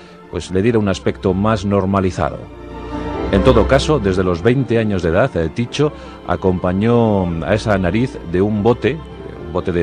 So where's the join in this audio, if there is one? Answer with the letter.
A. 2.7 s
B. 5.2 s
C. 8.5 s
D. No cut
B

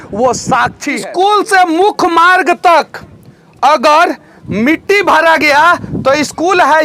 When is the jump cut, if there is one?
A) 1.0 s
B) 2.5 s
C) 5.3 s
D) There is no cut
A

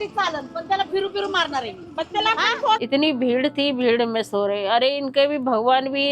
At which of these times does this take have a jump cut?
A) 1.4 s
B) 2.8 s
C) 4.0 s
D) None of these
B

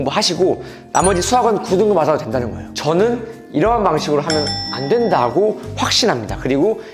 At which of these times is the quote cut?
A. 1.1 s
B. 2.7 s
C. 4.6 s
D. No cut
B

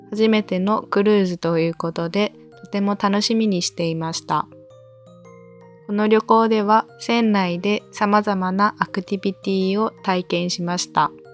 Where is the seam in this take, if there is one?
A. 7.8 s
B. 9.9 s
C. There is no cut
C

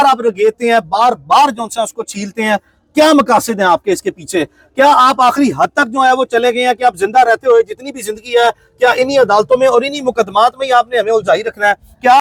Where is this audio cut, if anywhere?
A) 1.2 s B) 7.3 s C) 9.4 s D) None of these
D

